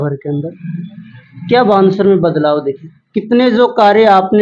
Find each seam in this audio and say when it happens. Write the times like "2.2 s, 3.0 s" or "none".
none